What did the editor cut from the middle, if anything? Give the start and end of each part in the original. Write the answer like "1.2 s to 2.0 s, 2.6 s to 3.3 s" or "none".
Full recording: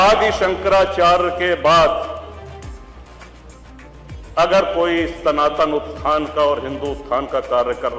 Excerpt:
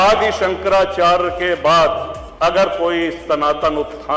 2.2 s to 4.2 s